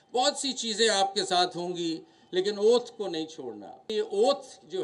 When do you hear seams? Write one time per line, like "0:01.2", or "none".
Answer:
0:03.9